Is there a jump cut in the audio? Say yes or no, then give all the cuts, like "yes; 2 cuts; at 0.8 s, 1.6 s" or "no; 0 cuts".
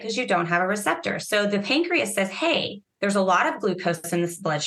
no; 0 cuts